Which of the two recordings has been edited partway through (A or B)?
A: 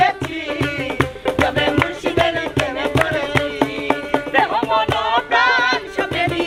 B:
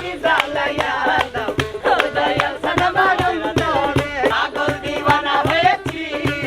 B